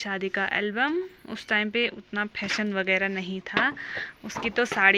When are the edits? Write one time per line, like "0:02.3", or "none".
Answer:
none

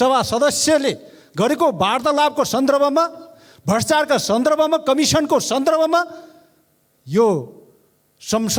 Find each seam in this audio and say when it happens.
none

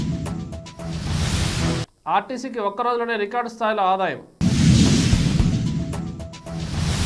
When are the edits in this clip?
none

